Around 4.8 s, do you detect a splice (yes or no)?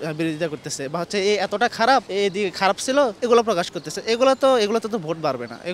no